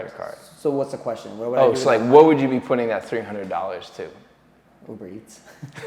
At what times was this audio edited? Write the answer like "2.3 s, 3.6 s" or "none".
none